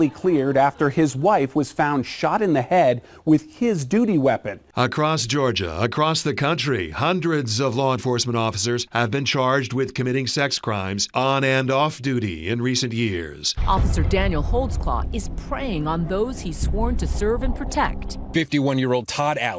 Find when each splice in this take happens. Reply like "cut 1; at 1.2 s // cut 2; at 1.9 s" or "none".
cut 1; at 4.6 s // cut 2; at 13.5 s // cut 3; at 18.3 s